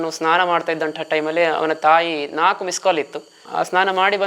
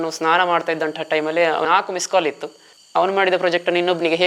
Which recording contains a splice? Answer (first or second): second